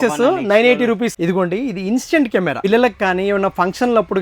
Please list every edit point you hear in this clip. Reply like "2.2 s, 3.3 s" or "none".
1.1 s, 2.6 s

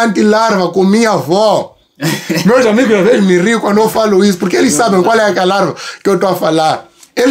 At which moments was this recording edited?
none

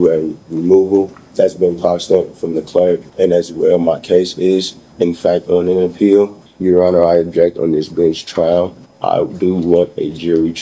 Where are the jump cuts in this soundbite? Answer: 1.2 s, 3.1 s, 6.4 s, 8.8 s

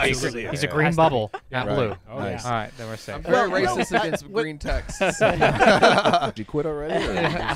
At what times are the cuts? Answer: 6.4 s

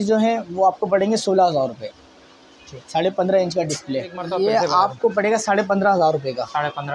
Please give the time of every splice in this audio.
4.2 s

